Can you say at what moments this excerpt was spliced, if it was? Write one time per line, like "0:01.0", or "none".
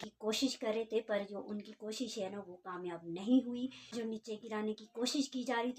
none